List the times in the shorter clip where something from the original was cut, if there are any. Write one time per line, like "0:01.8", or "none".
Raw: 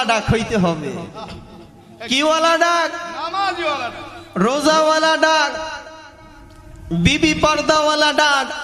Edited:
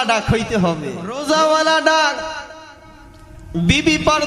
0:01.2